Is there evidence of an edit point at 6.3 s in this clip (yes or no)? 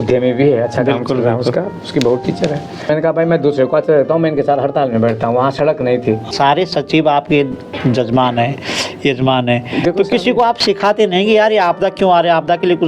yes